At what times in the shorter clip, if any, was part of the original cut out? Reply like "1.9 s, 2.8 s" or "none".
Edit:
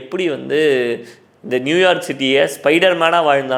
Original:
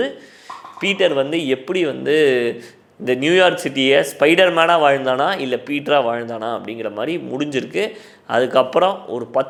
none